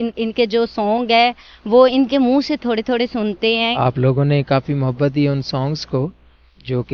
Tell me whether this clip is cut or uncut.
cut